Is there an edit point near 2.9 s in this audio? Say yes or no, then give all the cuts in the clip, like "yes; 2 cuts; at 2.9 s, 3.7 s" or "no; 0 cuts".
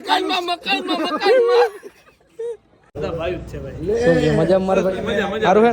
yes; 1 cut; at 2.9 s